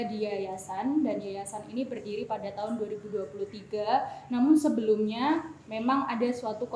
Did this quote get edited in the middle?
no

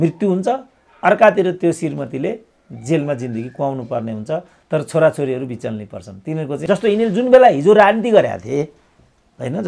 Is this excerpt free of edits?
no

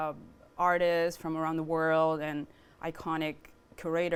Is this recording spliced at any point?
no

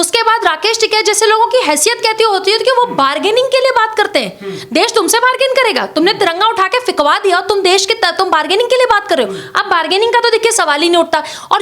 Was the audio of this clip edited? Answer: no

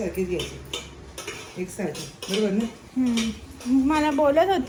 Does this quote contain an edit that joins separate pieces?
no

